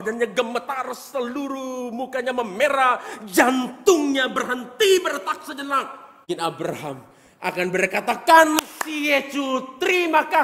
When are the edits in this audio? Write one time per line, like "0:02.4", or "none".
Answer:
0:06.2